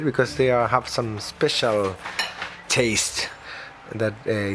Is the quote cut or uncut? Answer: uncut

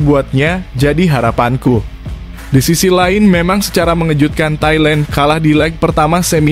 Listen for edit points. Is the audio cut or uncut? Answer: uncut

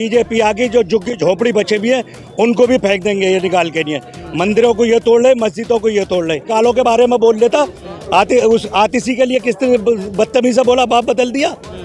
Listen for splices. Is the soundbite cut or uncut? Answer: cut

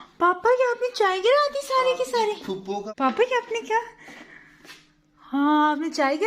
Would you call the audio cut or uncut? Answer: uncut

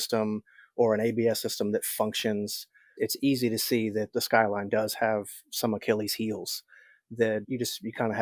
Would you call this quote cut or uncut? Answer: uncut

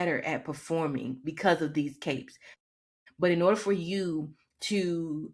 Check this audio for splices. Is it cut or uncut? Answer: cut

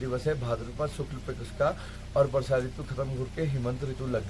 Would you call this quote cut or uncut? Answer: uncut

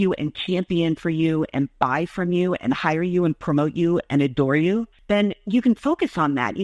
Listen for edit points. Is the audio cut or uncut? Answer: cut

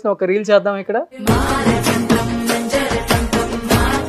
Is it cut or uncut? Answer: cut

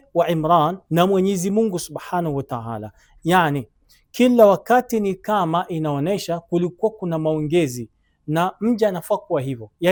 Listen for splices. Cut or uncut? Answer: uncut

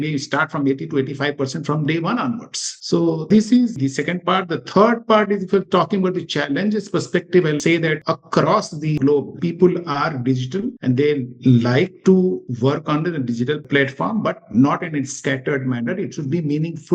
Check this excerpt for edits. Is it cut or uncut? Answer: uncut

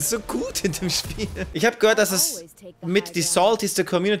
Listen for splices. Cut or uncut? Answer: uncut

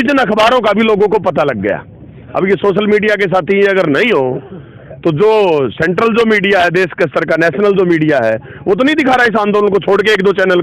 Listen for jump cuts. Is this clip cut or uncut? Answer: uncut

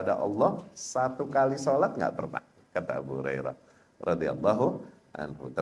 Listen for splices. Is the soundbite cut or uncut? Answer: uncut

